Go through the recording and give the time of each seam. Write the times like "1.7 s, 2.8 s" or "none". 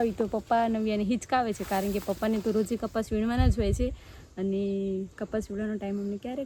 none